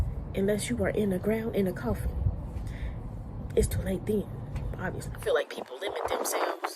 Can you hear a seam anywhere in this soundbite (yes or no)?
yes